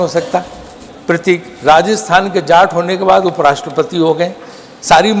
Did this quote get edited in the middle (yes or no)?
no